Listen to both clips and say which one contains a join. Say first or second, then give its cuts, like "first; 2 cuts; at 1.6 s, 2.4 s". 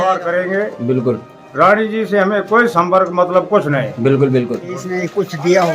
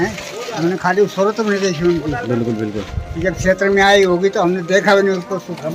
first; 1 cut; at 4.5 s